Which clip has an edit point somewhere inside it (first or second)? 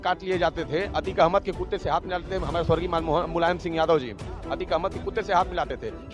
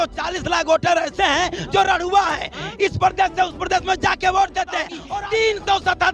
second